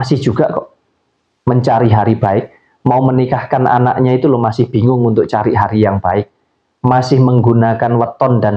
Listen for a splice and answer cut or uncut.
uncut